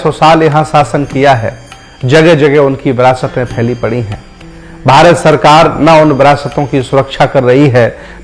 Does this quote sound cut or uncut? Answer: uncut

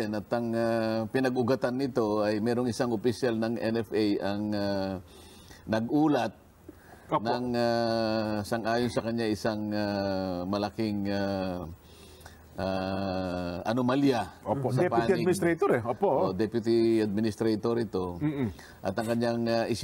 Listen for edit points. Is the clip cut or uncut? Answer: uncut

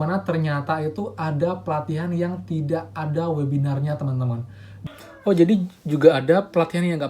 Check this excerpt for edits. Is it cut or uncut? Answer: cut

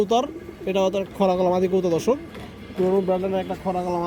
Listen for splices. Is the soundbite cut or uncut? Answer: uncut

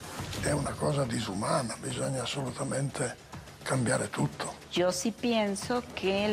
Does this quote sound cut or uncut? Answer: cut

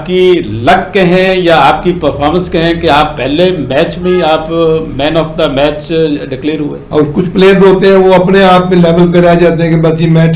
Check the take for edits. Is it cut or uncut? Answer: cut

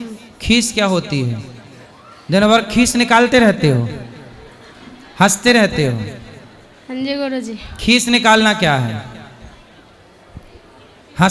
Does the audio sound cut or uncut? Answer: uncut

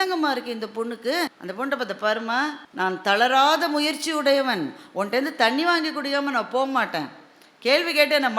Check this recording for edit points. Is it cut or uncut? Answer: cut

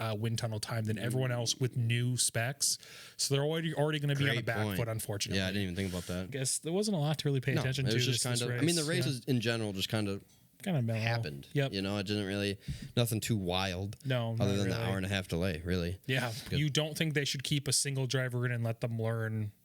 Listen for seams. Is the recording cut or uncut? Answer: cut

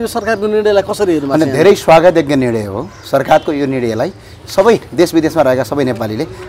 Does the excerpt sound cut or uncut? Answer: uncut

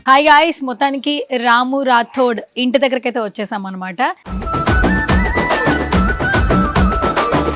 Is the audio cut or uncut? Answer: cut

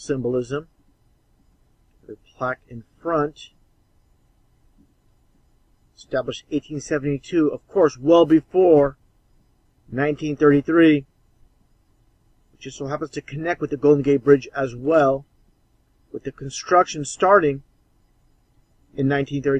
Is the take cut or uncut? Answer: uncut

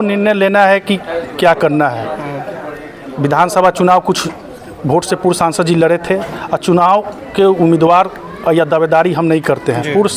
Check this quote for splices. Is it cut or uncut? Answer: uncut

